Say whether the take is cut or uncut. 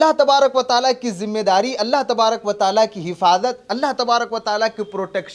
uncut